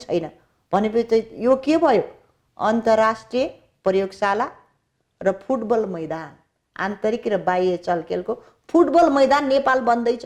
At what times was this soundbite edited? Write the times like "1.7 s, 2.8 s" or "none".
none

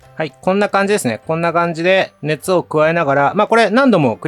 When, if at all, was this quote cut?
none

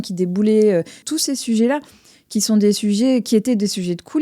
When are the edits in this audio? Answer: 1.0 s

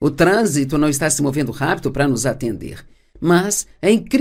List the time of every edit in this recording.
none

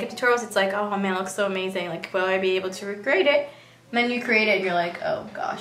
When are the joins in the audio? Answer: none

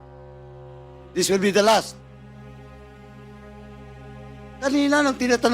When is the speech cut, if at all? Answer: 1.9 s, 4.1 s

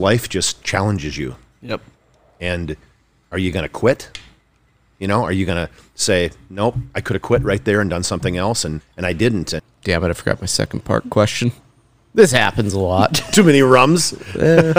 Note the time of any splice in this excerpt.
8.9 s, 9.6 s

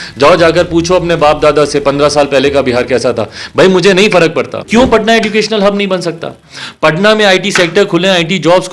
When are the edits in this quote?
4.6 s

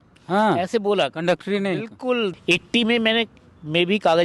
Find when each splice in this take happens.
2.3 s

